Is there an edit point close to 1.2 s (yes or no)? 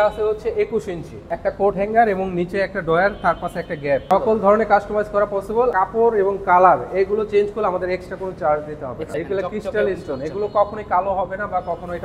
yes